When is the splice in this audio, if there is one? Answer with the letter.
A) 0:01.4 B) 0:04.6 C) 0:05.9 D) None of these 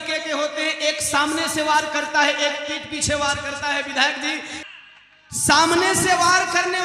B